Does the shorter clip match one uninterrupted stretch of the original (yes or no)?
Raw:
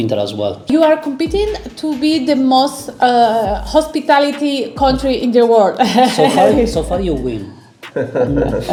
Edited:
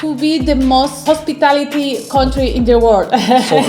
no